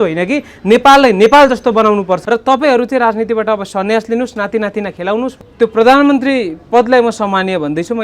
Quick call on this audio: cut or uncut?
cut